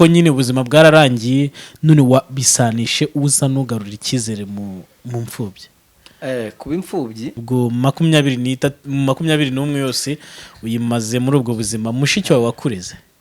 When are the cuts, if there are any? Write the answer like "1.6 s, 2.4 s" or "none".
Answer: 7.4 s

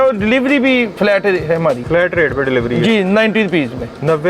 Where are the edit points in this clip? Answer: 0.9 s, 1.8 s

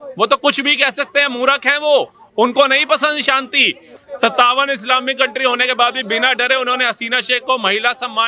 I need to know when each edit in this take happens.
3.9 s

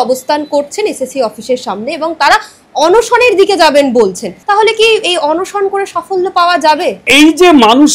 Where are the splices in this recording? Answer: 4.3 s, 7.1 s

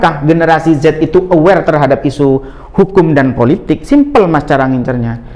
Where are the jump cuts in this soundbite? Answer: none

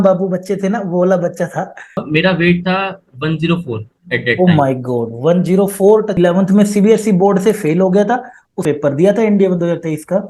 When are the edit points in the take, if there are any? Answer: 2.0 s, 6.2 s, 8.6 s

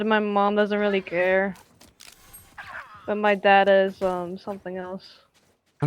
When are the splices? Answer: none

